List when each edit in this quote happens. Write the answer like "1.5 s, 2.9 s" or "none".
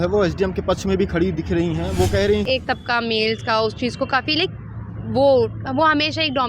2.4 s